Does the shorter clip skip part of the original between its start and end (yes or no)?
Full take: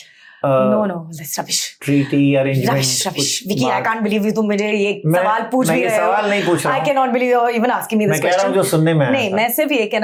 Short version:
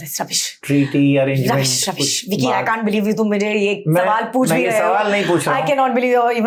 no